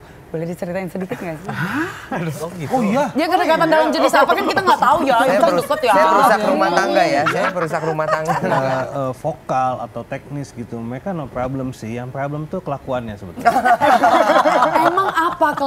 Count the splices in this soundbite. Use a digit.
1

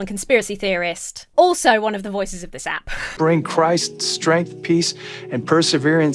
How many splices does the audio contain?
1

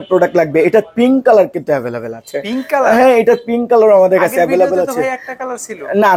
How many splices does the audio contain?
0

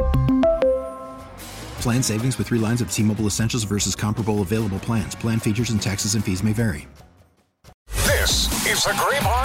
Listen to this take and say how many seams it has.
1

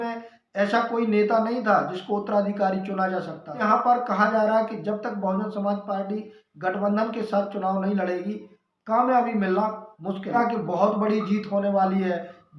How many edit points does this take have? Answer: 2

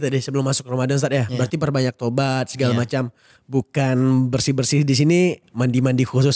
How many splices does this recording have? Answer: 0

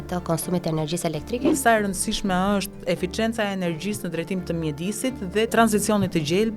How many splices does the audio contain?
2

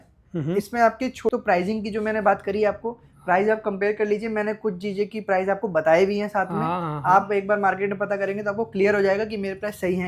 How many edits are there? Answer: 1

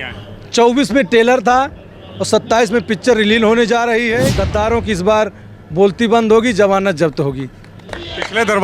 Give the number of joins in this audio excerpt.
1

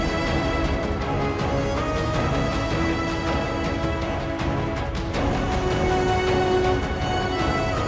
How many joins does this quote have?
0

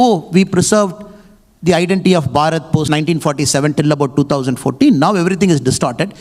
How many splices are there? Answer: 1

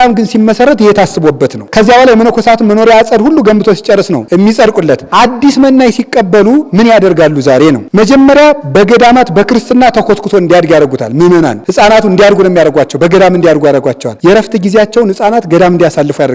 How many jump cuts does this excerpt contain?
0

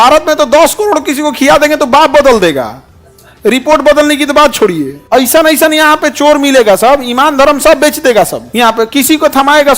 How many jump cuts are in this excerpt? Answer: 2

